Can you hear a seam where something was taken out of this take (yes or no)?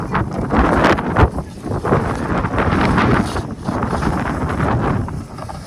no